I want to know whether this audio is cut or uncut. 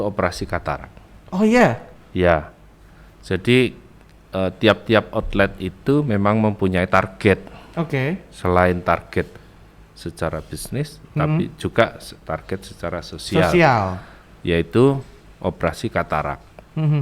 uncut